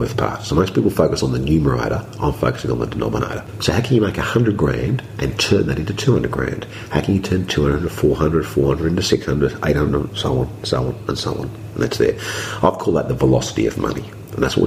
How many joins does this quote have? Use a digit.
1